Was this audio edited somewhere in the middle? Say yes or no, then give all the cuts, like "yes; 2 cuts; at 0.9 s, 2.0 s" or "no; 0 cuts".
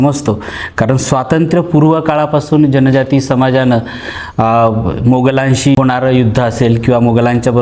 yes; 1 cut; at 5.7 s